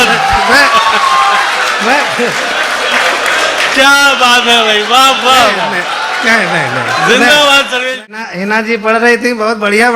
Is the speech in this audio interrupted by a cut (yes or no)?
yes